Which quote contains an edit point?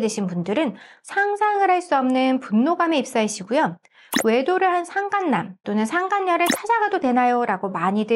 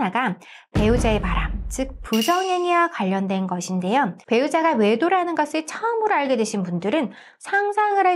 second; 1 cut; at 4.2 s

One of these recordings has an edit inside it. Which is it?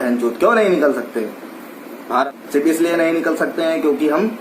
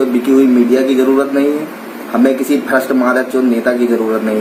first; 1 cut; at 2.2 s

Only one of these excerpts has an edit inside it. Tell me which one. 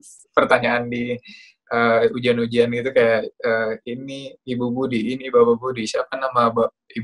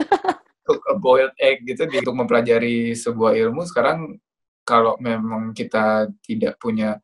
second; 1 cut; at 2.0 s

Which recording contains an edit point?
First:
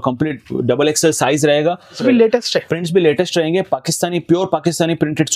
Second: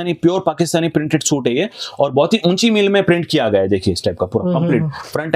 first; 1 cut; at 2.0 s

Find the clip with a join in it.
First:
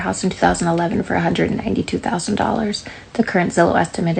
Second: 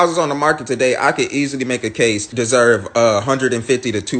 second; 1 cut; at 2.3 s

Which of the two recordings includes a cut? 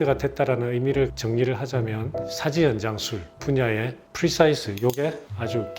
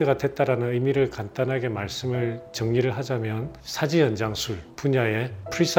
first; 1 cut; at 1.2 s

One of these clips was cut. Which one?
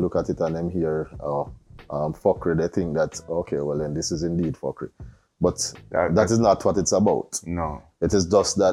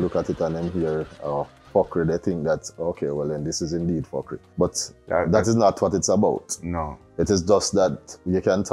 second; 2 cuts; at 1.7 s, 4.4 s

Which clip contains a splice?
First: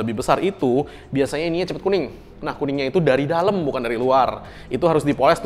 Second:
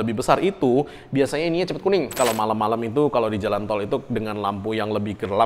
second; 1 cut; at 2.1 s

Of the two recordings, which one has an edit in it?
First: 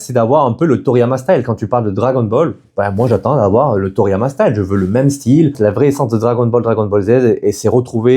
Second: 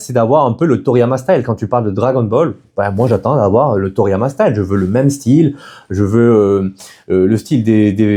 first; 1 cut; at 5.6 s

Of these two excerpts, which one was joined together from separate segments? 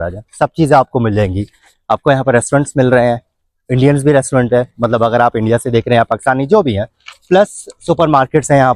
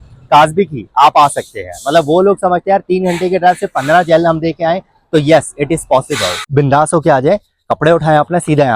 second; 1 cut; at 6.4 s

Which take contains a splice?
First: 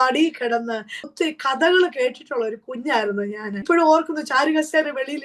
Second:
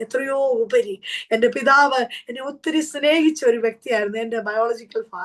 first; 2 cuts; at 1.0 s, 3.6 s

